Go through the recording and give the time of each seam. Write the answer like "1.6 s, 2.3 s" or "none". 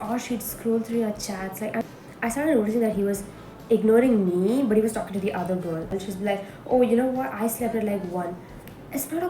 1.8 s, 5.9 s